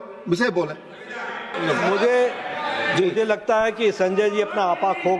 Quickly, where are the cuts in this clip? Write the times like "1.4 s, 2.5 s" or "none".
1.5 s